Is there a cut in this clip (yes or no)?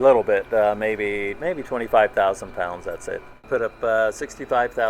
yes